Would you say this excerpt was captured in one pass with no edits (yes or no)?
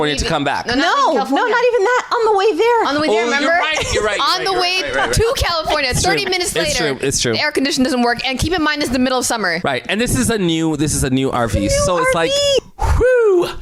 no